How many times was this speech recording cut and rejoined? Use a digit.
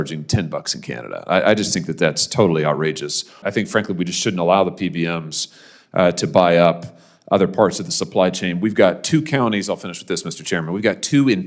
1